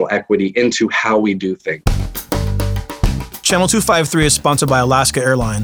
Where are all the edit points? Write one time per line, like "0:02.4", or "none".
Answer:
0:01.7